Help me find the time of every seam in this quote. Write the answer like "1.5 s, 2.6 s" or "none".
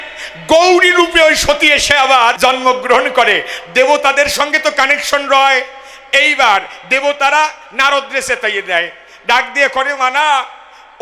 2.4 s

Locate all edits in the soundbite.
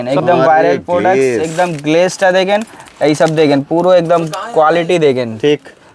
none

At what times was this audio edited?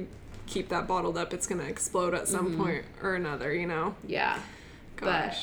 none

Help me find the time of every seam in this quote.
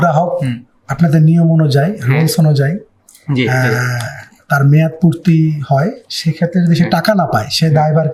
none

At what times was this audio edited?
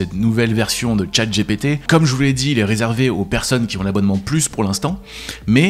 1.9 s

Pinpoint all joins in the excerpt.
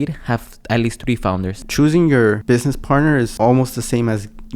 1.5 s, 2.4 s, 3.3 s

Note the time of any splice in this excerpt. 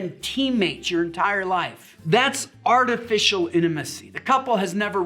1.9 s

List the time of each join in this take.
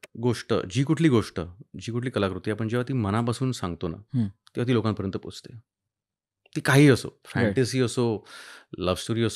none

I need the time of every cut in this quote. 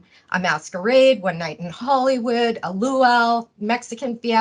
none

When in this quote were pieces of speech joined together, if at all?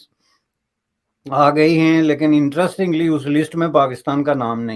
none

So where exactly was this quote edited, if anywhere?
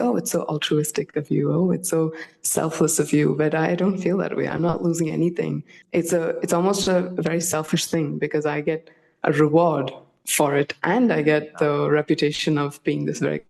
5.7 s

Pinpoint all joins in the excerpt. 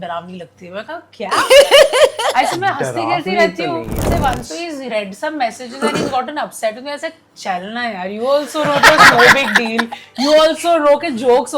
4.0 s

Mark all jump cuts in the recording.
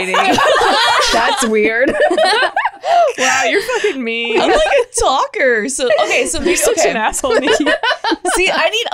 none

